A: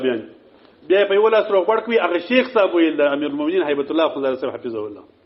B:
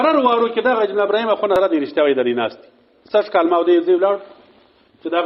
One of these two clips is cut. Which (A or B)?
B